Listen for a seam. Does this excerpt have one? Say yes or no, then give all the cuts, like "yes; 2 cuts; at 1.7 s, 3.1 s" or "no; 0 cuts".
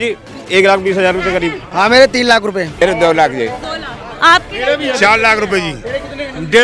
yes; 2 cuts; at 1.6 s, 2.8 s